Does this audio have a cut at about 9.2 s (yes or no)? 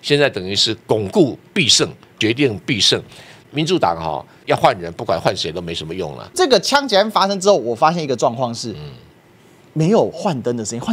no